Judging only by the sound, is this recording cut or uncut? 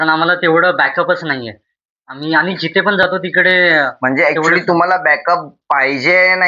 uncut